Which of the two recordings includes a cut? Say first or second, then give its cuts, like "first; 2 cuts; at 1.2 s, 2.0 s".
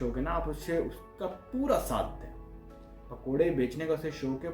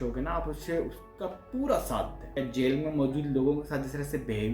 second; 1 cut; at 2.2 s